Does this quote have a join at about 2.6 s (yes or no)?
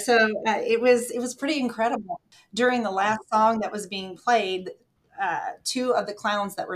yes